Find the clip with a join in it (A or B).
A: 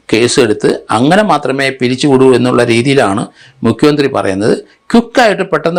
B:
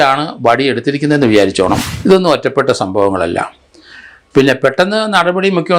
B